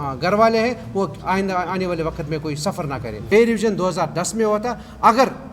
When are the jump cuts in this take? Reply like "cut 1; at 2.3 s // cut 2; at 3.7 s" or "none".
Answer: cut 1; at 3.3 s

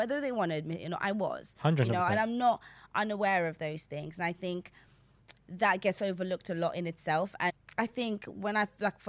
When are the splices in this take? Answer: cut 1; at 7.6 s

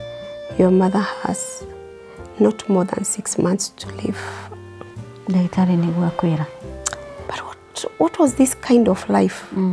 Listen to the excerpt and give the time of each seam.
cut 1; at 7.2 s

